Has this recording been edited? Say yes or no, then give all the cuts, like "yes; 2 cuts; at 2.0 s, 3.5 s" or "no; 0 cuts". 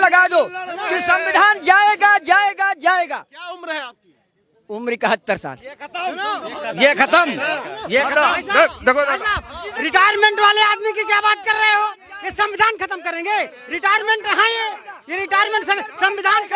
no; 0 cuts